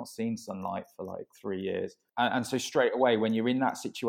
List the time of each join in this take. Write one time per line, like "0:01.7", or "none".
0:01.9